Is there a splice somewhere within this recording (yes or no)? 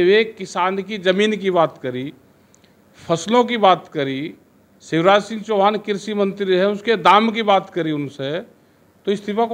no